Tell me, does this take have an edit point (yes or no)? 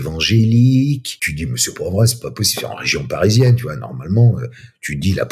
yes